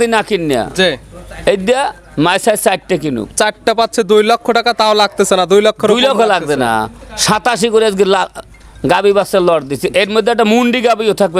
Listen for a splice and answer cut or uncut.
uncut